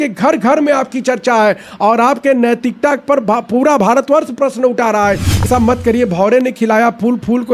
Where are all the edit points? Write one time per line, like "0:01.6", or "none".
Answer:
0:05.5